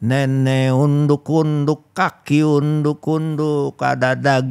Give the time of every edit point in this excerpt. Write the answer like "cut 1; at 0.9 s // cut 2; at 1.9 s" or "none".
none